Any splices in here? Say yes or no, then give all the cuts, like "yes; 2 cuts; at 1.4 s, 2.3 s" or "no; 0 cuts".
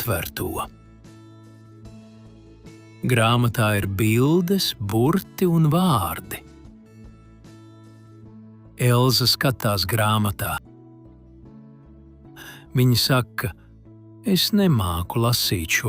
yes; 2 cuts; at 6.4 s, 8.2 s